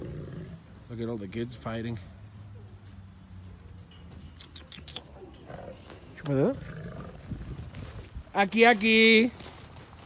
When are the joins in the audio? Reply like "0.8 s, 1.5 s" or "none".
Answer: none